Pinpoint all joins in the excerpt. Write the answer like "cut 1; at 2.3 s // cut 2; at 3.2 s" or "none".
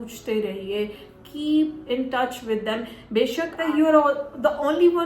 cut 1; at 3.6 s